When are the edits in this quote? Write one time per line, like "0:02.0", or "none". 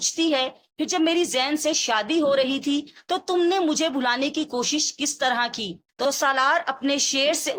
none